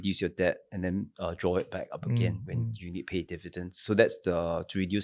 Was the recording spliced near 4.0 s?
no; 0 cuts

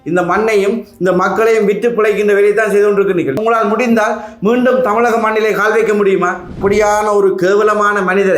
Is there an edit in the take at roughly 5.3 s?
no; 2 cuts; at 3.4 s, 6.6 s

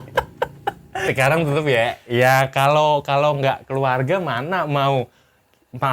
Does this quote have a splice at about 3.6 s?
no; 1 cut; at 1.0 s

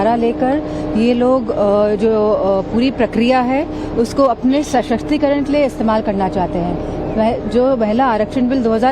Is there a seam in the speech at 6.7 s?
yes; 1 cut; at 6.7 s

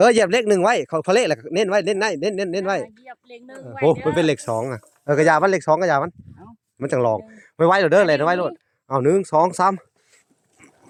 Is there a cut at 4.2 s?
no; 0 cuts

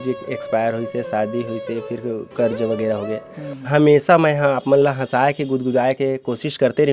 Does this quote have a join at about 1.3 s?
no; 1 cut; at 3.3 s

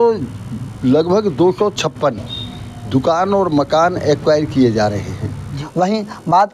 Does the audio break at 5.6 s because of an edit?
yes; 1 cut; at 5.6 s

